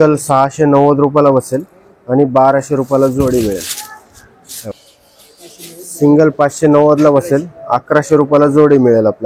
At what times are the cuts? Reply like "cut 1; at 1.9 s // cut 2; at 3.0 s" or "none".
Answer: cut 1; at 4.7 s